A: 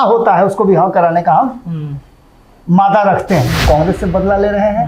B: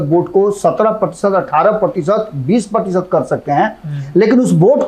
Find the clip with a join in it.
A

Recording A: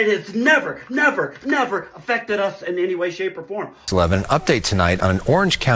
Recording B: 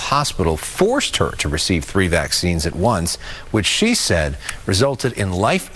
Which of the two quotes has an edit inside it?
A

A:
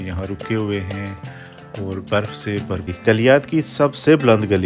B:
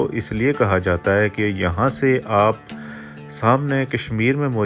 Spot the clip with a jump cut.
A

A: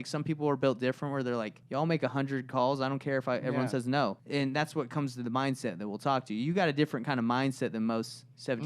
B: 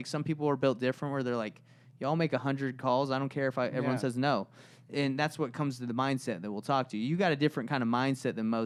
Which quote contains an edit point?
A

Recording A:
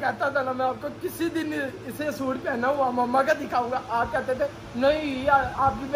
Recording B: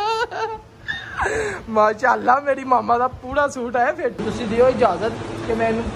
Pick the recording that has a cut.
B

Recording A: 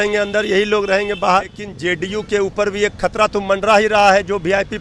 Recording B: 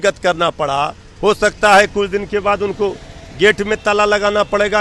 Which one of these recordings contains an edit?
A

